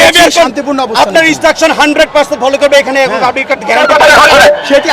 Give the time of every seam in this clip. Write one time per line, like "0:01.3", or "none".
0:03.8

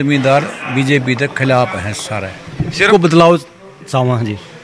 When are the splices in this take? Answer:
0:02.9

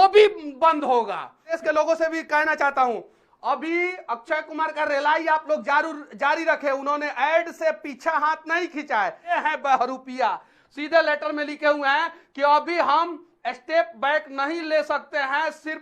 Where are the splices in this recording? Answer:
0:01.6
0:09.4

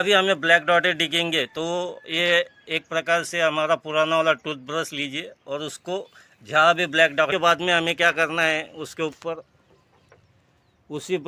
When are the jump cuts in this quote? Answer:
0:07.3

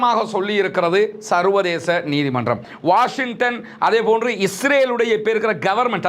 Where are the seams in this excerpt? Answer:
0:02.7

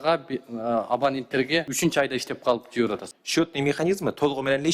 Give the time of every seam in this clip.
0:01.7
0:03.1

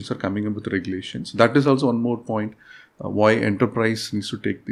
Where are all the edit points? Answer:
none

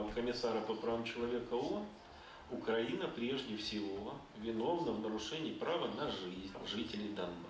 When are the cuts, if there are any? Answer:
0:06.6

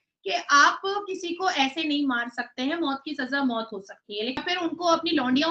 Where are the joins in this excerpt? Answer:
0:04.4

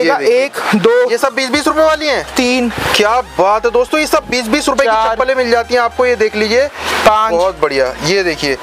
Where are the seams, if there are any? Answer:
none

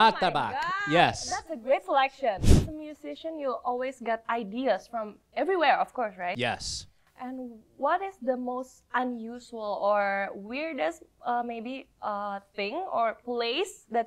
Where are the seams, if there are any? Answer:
0:02.4

